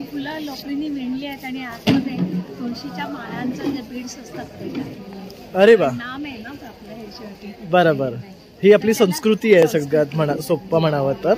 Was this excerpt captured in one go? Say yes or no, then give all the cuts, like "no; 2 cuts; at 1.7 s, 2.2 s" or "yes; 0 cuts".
yes; 0 cuts